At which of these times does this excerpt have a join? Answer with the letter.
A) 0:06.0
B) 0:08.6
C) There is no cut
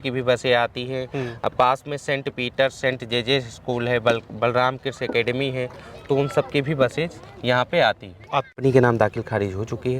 B